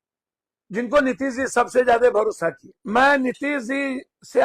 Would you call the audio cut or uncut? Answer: cut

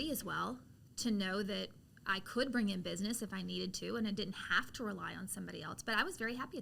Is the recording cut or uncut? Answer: uncut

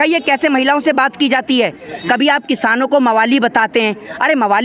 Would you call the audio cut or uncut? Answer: uncut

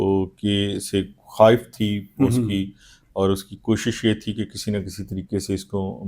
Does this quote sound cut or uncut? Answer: uncut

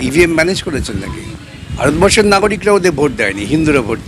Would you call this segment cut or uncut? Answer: cut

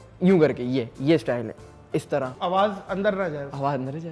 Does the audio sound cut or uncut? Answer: cut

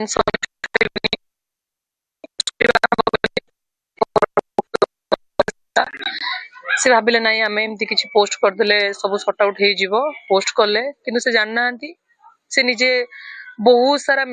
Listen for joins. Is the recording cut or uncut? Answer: cut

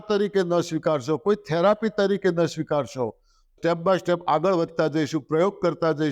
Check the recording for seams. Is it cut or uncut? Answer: cut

